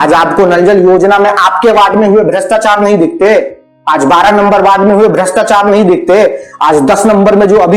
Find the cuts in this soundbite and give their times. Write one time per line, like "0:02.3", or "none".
none